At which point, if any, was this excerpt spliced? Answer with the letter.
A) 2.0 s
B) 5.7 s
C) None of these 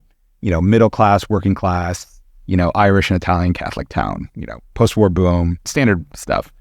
B